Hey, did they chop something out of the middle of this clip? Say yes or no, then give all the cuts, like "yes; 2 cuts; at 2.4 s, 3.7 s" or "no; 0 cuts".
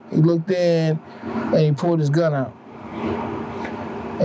no; 0 cuts